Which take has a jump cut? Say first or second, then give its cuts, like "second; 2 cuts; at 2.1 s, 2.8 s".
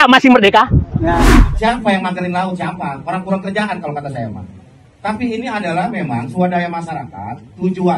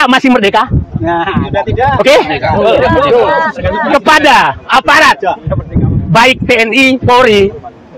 first; 1 cut; at 1.3 s